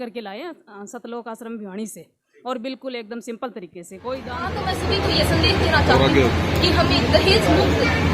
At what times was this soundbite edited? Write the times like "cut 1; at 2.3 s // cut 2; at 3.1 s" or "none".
cut 1; at 4.5 s